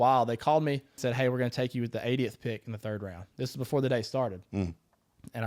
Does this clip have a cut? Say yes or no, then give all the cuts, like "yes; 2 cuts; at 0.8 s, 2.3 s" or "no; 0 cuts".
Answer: yes; 1 cut; at 1.0 s